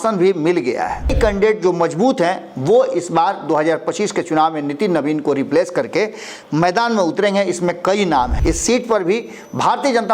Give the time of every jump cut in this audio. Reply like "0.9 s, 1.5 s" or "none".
1.1 s, 8.3 s